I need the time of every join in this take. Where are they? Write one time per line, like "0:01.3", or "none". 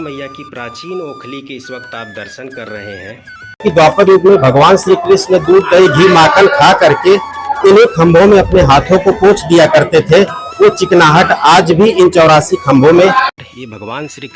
0:03.6
0:13.4